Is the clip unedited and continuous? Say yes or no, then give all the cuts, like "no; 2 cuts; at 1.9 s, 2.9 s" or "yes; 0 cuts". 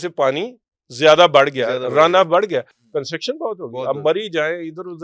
yes; 0 cuts